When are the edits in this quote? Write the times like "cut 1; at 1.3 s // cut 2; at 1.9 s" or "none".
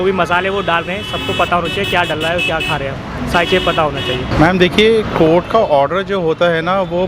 cut 1; at 4.3 s